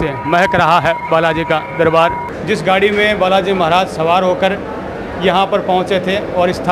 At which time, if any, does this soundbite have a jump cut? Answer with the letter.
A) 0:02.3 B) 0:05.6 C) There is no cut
A